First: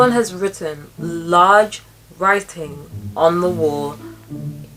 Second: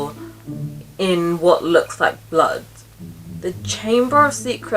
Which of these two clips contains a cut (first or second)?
second